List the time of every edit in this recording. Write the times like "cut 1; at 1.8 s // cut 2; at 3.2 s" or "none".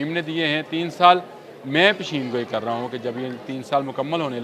none